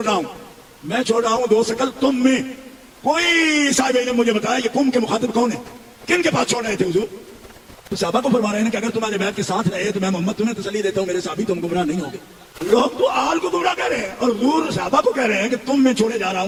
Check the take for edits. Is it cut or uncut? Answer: uncut